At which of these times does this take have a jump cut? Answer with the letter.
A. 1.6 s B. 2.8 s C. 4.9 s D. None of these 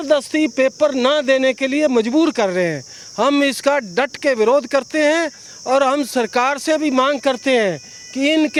D